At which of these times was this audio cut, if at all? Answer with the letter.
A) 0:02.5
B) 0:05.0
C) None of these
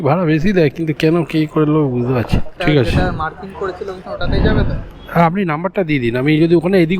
A